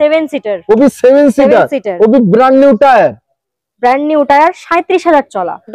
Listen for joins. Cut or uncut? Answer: uncut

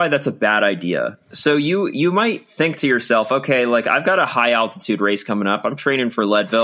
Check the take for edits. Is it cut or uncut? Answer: cut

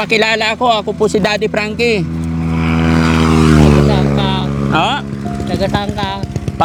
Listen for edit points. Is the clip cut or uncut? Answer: uncut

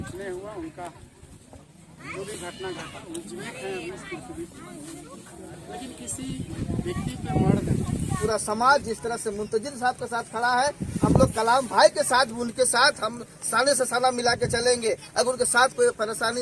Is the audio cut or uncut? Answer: cut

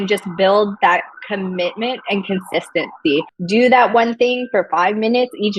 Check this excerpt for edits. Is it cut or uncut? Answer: cut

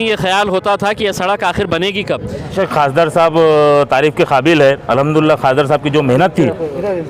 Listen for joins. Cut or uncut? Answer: cut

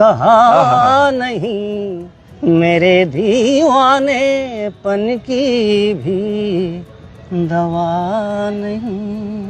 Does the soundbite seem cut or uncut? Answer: uncut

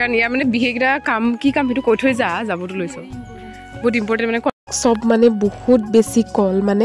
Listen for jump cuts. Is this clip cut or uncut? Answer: cut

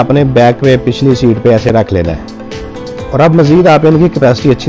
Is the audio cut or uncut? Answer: uncut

